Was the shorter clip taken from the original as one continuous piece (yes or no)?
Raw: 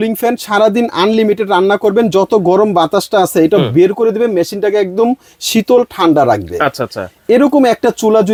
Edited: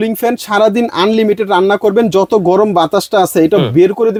yes